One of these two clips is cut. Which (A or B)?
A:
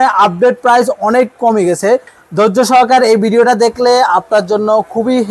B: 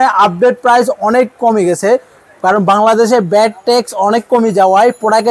A